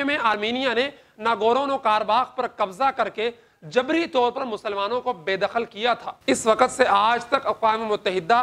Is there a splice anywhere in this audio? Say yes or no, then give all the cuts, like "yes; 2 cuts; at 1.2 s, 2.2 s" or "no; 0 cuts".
no; 0 cuts